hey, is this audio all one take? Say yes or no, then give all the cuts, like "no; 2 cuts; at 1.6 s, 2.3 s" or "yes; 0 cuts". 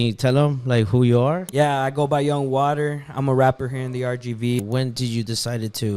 no; 2 cuts; at 1.5 s, 4.6 s